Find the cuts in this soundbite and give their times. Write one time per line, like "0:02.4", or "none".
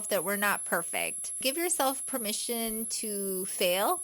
0:01.4

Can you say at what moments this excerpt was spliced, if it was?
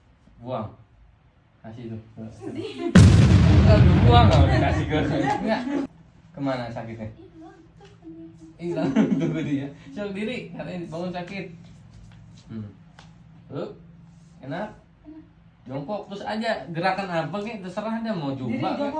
0:05.8

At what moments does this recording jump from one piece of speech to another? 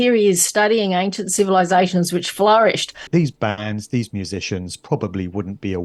0:03.1

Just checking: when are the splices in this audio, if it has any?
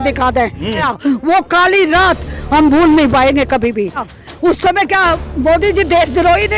0:00.9
0:04.1

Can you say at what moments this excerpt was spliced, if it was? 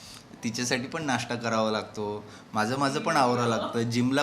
none

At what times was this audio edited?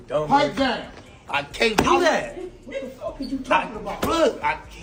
none

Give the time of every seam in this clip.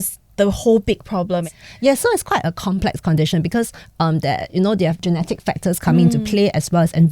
0:05.0

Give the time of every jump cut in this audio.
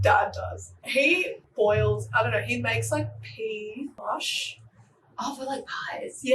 0:01.1

